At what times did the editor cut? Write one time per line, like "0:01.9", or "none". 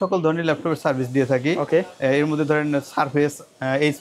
none